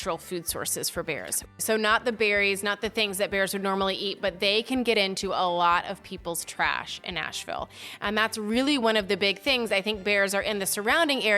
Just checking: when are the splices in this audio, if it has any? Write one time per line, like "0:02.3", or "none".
0:01.4